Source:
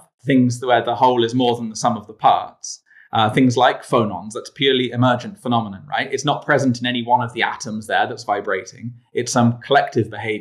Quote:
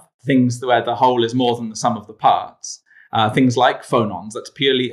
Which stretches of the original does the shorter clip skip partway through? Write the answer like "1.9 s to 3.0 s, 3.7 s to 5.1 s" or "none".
none